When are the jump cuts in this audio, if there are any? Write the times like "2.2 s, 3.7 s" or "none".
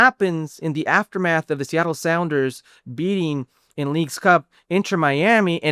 none